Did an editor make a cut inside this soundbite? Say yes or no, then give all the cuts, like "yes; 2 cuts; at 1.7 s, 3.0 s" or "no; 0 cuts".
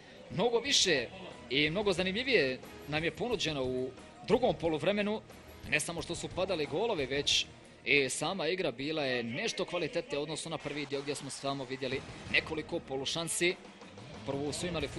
no; 0 cuts